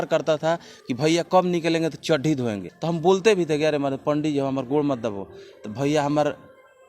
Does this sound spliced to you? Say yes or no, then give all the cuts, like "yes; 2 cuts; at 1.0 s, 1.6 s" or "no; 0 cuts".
yes; 1 cut; at 2.7 s